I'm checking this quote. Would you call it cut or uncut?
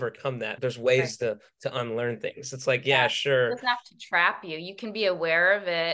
uncut